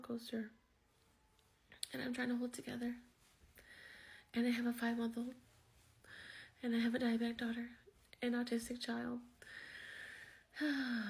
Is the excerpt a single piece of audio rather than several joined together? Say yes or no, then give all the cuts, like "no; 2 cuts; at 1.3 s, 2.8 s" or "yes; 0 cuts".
no; 1 cut; at 8.7 s